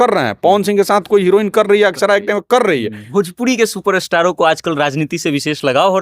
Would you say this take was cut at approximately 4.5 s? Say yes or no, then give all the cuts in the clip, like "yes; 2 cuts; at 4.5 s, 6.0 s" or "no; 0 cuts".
no; 1 cut; at 3.0 s